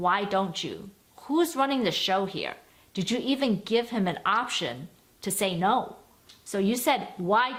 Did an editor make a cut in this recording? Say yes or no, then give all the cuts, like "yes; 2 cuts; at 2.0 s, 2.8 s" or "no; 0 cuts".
no; 0 cuts